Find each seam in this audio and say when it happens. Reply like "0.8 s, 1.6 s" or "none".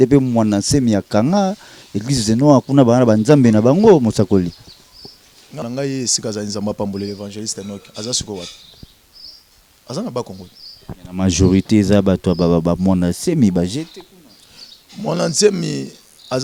5.6 s